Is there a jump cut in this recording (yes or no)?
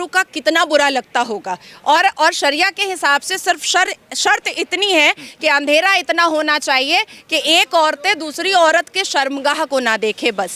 no